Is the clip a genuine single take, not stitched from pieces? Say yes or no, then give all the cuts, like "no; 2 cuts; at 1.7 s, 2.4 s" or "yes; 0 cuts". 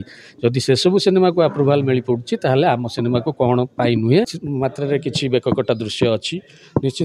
no; 1 cut; at 4.4 s